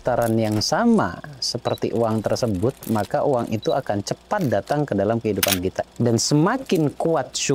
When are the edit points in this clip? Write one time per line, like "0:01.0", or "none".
0:05.8